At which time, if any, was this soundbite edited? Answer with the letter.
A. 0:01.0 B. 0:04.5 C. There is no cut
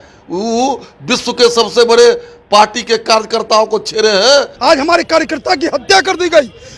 B